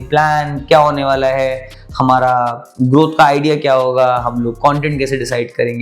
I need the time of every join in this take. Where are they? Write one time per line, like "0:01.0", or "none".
none

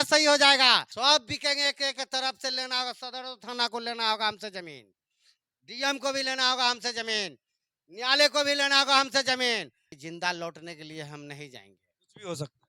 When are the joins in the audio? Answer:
0:00.9
0:09.9

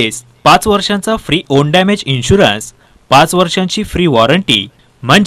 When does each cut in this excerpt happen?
none

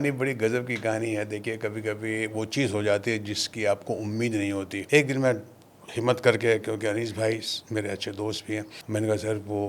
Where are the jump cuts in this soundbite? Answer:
0:04.8
0:08.8

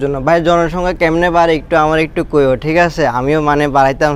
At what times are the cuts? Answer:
none

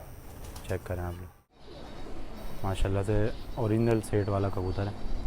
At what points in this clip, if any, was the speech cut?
0:01.6

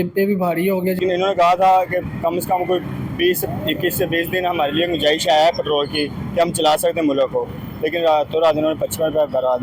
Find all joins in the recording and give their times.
0:01.0

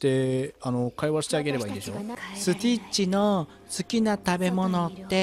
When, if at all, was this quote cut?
0:02.1

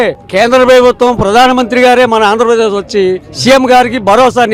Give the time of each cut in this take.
none

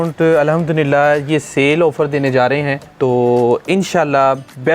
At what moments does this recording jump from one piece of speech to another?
0:02.8

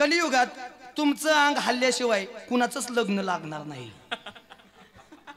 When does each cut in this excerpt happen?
none

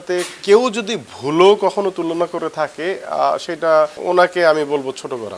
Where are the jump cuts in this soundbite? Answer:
0:04.0

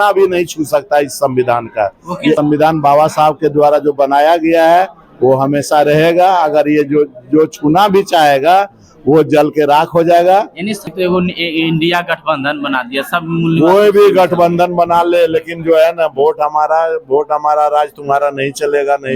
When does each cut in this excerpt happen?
0:02.4
0:10.8

